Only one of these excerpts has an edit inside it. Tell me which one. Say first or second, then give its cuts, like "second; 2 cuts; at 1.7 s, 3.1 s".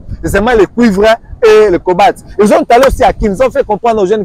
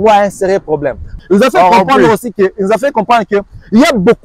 second; 1 cut; at 1.1 s